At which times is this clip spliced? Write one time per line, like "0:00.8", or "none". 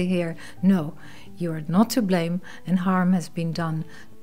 none